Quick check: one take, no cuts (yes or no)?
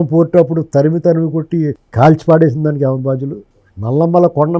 yes